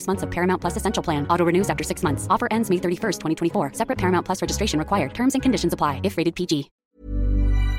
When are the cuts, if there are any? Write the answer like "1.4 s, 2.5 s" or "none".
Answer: 6.7 s